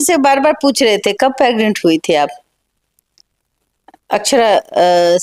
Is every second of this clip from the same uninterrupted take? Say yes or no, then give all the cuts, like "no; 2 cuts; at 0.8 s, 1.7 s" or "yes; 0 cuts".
yes; 0 cuts